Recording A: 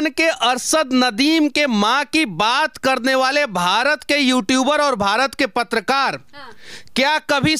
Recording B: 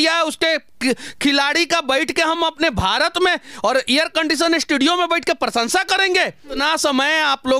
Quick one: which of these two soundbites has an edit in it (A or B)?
B